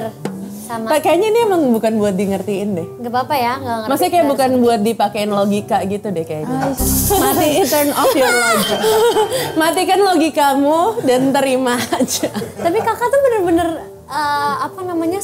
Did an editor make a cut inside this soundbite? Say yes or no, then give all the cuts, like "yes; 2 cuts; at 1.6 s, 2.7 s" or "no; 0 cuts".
no; 0 cuts